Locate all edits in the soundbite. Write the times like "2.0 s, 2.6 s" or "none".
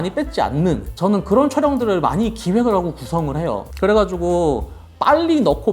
0.9 s, 3.7 s